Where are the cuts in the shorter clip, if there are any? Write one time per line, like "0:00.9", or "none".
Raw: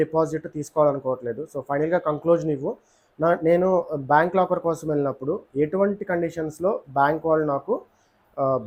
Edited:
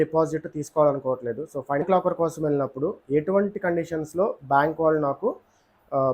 0:01.8